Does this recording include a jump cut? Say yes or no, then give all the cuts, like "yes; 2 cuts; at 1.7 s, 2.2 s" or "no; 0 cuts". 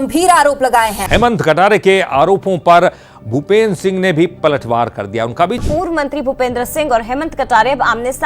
no; 0 cuts